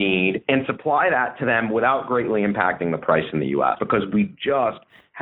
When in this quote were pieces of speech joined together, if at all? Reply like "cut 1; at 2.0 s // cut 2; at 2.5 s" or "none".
cut 1; at 3.8 s